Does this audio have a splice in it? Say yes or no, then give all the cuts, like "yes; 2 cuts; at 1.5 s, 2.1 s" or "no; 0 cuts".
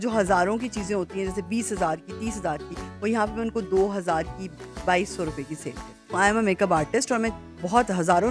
yes; 1 cut; at 6.1 s